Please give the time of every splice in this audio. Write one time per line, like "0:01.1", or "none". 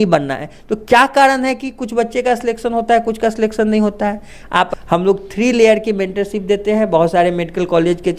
0:04.7